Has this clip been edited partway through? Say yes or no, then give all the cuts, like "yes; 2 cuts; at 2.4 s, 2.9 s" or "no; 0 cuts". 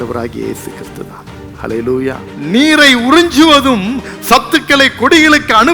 yes; 1 cut; at 2.3 s